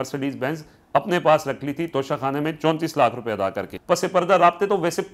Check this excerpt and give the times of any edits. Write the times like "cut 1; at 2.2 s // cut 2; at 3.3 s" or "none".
cut 1; at 3.7 s